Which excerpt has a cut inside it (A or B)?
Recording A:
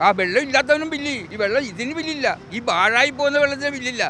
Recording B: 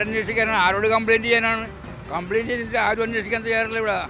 A